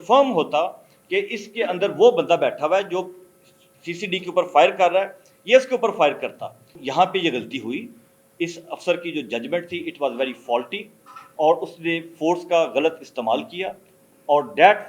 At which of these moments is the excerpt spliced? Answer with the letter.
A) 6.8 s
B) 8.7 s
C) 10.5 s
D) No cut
A